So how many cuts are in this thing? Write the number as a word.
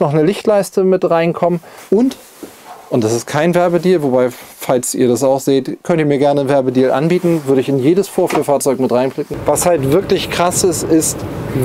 two